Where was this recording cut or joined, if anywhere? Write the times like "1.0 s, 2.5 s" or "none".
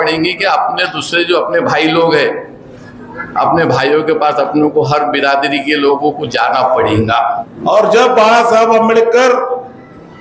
7.5 s